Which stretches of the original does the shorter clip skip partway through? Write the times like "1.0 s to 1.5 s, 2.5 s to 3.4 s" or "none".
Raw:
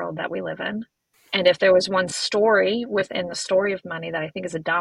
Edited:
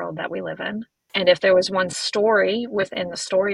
1.0 s to 1.2 s